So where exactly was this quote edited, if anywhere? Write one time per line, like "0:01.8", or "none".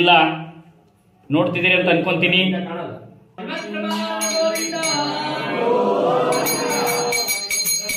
0:03.3